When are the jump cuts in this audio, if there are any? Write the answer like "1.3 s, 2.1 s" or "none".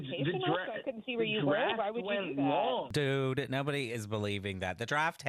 2.9 s